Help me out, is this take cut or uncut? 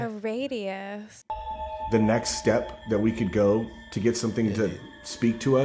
cut